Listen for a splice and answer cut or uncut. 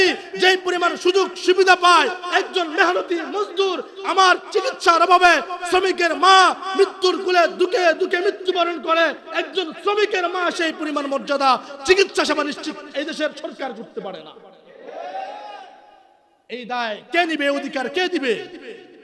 uncut